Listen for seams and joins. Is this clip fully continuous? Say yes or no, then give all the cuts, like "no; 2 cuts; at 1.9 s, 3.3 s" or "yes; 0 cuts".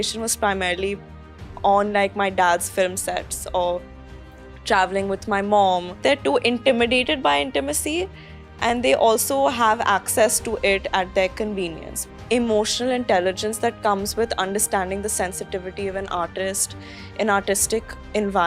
no; 2 cuts; at 6.0 s, 12.0 s